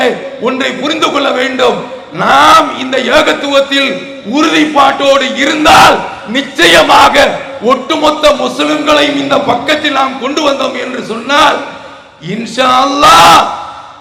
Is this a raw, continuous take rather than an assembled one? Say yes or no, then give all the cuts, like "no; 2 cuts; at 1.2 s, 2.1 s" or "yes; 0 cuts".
yes; 0 cuts